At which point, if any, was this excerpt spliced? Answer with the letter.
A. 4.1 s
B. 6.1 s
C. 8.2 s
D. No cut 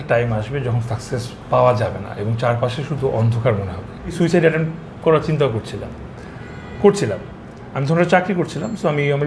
A